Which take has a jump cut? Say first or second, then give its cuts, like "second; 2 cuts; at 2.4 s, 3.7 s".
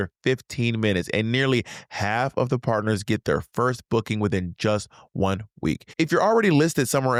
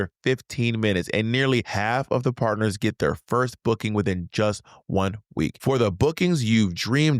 second; 2 cuts; at 1.7 s, 5.6 s